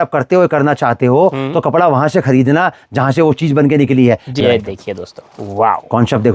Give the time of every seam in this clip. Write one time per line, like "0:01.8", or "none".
0:04.4